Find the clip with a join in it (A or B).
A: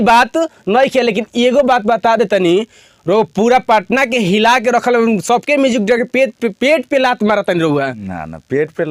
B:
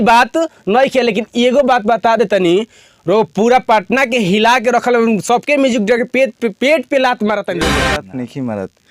B